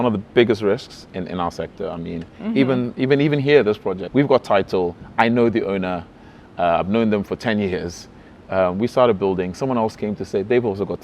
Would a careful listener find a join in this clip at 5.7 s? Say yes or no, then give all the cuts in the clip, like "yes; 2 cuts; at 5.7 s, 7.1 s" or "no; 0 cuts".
no; 2 cuts; at 1.0 s, 4.0 s